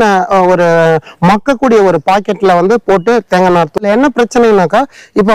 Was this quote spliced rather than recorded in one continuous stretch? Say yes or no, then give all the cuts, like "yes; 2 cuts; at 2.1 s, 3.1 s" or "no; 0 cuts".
yes; 1 cut; at 3.8 s